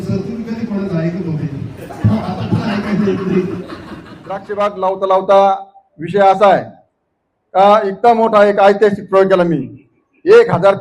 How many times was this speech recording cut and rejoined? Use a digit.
1